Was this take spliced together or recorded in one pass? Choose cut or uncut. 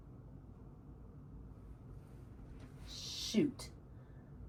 uncut